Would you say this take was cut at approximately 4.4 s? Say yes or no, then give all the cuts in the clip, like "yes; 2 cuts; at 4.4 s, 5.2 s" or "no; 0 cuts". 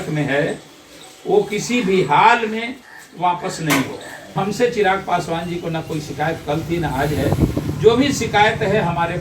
yes; 1 cut; at 4.4 s